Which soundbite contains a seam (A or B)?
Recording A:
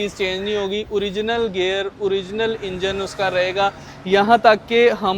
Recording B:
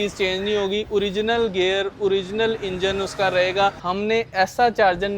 B